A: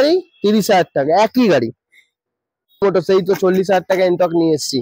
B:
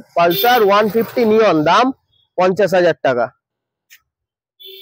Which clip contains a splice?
A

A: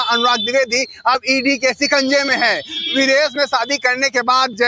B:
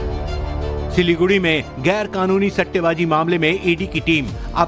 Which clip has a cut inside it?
A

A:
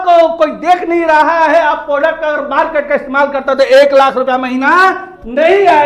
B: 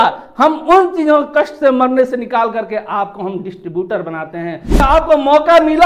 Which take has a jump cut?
B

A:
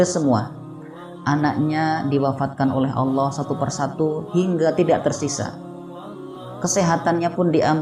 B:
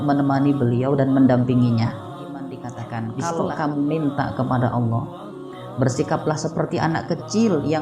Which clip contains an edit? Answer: B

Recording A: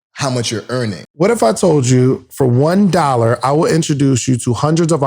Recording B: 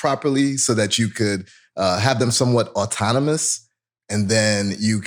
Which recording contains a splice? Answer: A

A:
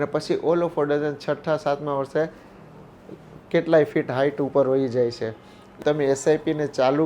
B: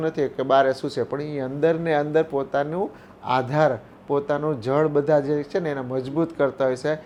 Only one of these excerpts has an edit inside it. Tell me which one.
A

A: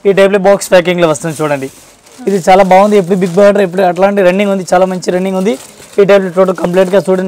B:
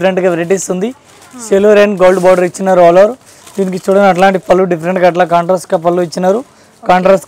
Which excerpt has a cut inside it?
A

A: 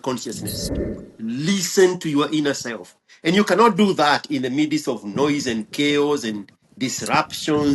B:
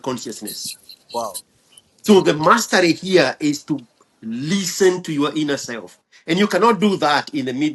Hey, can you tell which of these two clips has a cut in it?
A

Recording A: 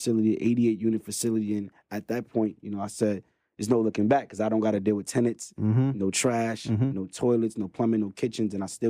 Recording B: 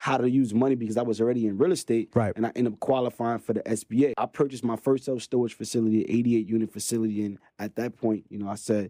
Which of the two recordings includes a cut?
B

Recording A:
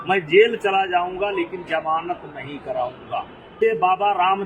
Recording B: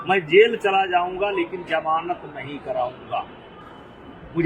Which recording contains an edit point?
A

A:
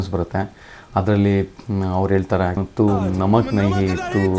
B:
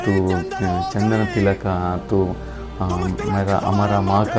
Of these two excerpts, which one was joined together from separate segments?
A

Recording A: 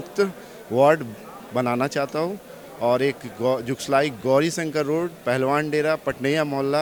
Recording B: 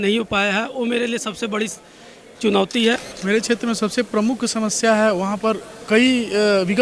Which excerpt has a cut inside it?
B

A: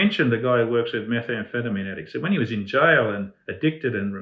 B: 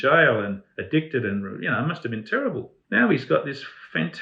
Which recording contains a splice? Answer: B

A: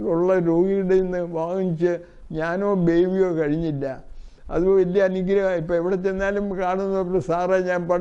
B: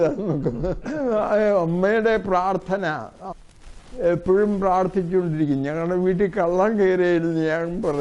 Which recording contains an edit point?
B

